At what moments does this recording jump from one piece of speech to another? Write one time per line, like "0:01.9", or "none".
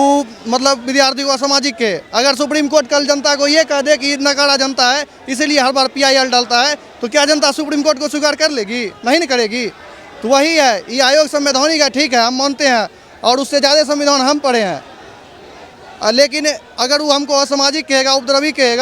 none